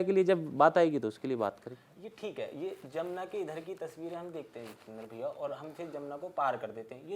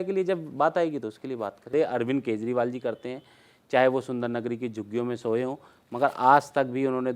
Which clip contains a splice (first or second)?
second